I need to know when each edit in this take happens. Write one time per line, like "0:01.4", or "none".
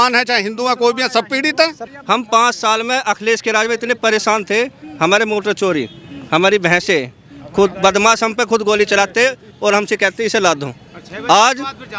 0:01.9